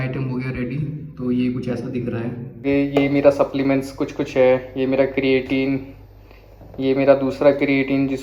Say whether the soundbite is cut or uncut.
cut